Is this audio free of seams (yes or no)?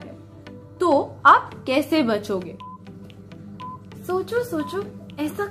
yes